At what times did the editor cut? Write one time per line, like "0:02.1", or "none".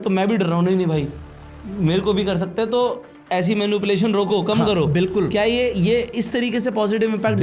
none